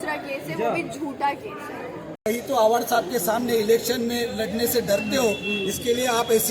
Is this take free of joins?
no; 1 cut; at 2.3 s

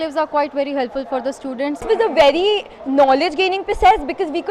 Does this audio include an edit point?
yes; 1 cut; at 1.8 s

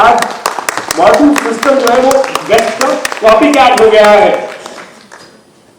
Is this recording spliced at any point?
no; 0 cuts

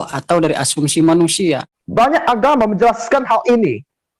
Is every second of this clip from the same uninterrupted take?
no; 1 cut; at 1.8 s

